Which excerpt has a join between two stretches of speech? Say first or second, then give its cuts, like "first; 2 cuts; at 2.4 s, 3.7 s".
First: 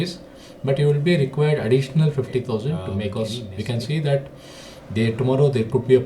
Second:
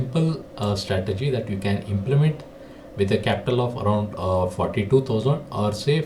first; 1 cut; at 3.0 s